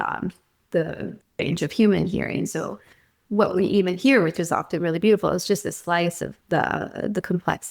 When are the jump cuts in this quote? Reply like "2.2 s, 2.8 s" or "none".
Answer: 6.3 s

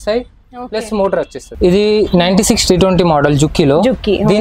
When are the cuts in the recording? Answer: 1.4 s

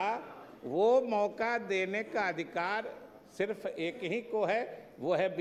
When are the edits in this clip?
none

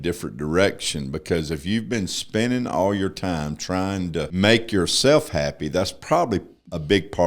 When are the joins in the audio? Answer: 4.3 s

